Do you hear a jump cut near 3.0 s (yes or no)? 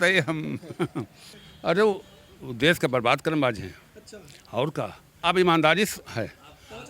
no